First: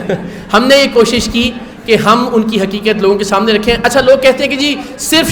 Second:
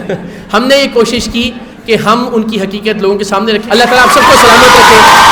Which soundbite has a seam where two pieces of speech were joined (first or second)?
second